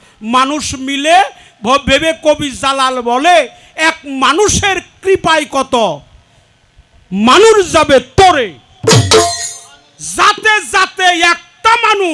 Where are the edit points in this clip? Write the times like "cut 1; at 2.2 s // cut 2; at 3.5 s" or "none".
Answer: none